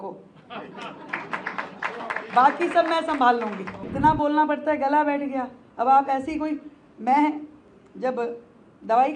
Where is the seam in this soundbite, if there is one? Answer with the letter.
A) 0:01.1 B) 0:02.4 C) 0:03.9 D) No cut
C